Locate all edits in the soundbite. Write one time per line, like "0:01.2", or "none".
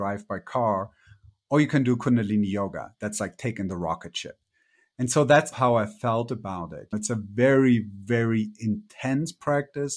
0:05.5
0:06.9